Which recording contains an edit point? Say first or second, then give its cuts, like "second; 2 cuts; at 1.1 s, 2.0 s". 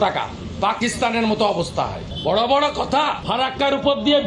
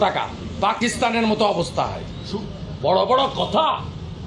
first; 2 cuts; at 2.1 s, 3.2 s